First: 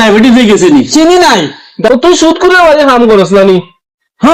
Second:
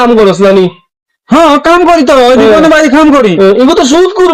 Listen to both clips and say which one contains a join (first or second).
first